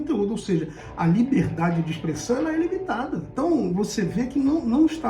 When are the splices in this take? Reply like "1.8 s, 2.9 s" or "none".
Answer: 3.3 s